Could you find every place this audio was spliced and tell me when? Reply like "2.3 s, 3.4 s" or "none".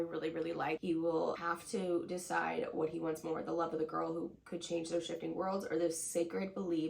0.8 s, 1.4 s